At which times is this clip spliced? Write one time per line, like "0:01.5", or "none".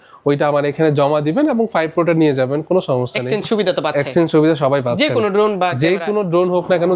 none